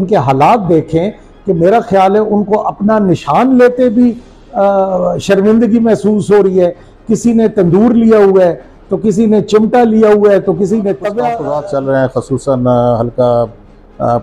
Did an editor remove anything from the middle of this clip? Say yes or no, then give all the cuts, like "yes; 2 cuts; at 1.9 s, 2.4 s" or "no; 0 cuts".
yes; 1 cut; at 11.4 s